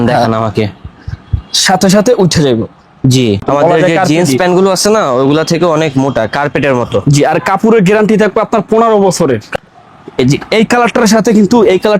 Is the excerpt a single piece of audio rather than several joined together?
no; 2 cuts; at 3.4 s, 9.5 s

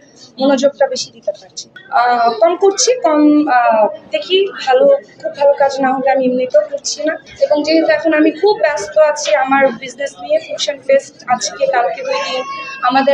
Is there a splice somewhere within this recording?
yes; 2 cuts; at 1.6 s, 7.2 s

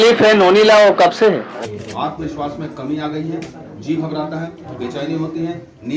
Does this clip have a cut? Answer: yes; 1 cut; at 1.6 s

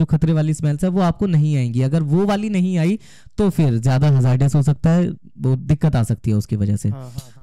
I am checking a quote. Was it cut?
no; 0 cuts

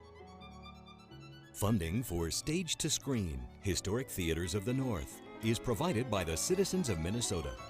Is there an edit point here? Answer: yes; 1 cut; at 1.6 s

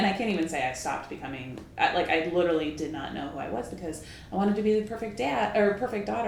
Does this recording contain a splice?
no; 0 cuts

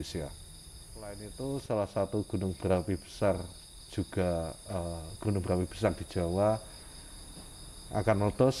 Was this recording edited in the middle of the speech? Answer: yes; 1 cut; at 1.3 s

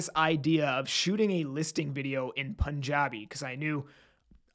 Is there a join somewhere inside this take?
no; 0 cuts

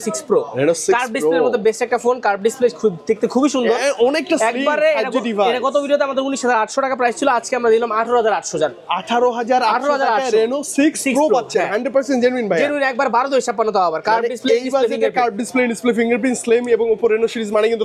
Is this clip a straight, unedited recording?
yes; 0 cuts

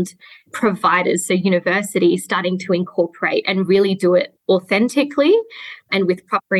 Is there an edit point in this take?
no; 0 cuts

